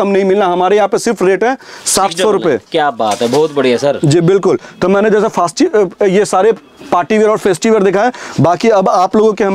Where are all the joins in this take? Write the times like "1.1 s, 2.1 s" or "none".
none